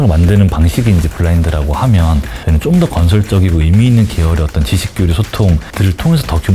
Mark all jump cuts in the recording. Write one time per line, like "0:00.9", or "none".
none